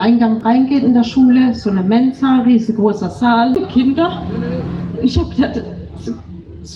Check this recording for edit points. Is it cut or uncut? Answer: cut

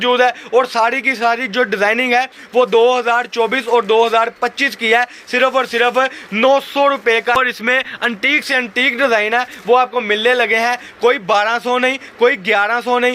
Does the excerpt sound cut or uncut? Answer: cut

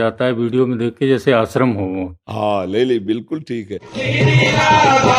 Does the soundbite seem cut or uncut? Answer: cut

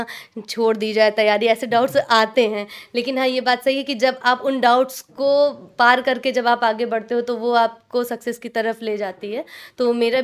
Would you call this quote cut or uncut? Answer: uncut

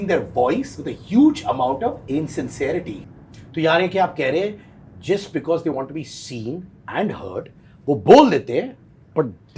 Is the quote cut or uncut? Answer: cut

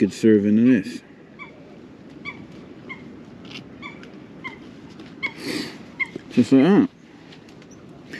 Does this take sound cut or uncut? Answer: uncut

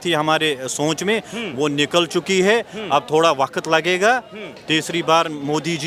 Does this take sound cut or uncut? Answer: uncut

